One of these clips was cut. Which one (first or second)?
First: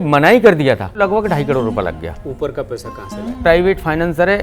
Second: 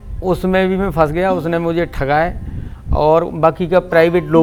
first